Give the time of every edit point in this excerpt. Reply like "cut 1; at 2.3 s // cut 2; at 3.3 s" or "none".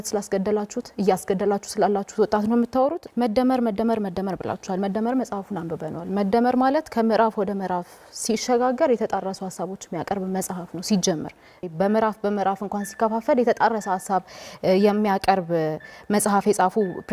cut 1; at 3.0 s // cut 2; at 11.6 s

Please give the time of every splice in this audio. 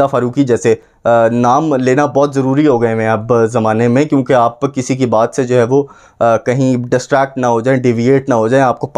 none

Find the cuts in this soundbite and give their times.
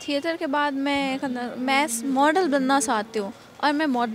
none

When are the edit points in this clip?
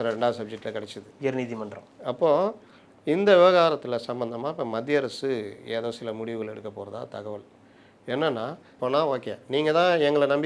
cut 1; at 8.6 s

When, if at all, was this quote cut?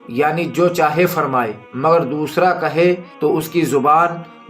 cut 1; at 3.1 s

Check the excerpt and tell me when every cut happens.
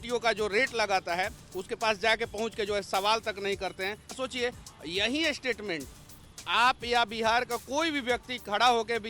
cut 1; at 4.1 s

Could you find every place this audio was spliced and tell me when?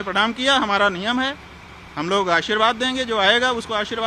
none

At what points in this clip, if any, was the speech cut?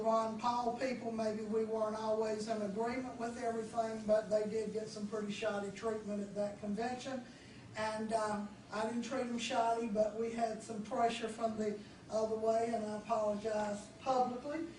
cut 1; at 1.1 s

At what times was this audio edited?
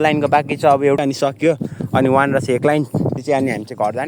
cut 1; at 1.0 s // cut 2; at 3.2 s

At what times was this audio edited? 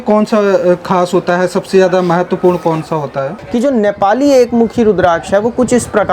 cut 1; at 3.3 s

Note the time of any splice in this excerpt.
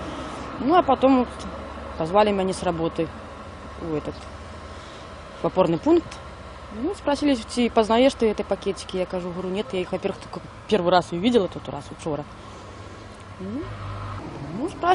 none

